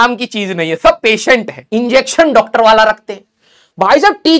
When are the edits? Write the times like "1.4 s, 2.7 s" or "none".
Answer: 1.6 s